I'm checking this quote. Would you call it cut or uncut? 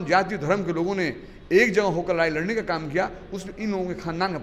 uncut